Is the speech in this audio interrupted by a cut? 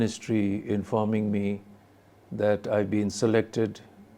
no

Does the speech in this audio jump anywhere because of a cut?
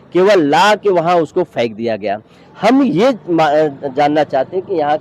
no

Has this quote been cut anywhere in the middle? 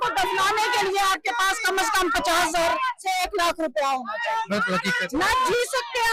no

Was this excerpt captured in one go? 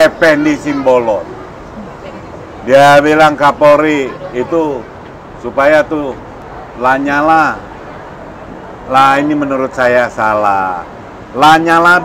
yes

